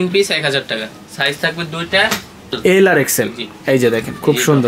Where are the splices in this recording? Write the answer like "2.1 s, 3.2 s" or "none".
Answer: 2.6 s